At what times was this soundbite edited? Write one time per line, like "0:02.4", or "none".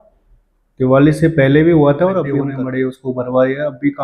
0:02.4